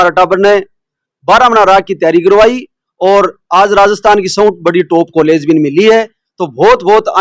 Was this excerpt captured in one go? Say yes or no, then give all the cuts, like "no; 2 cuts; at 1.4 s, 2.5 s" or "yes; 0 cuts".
yes; 0 cuts